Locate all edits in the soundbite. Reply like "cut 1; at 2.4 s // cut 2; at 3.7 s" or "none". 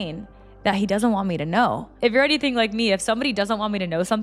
none